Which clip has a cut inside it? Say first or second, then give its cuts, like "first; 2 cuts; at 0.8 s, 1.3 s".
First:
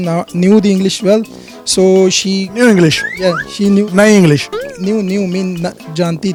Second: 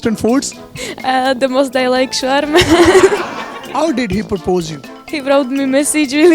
second; 1 cut; at 3.6 s